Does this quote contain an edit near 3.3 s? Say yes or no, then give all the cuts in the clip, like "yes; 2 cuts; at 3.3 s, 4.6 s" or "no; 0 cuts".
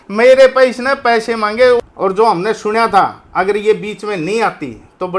no; 1 cut; at 1.8 s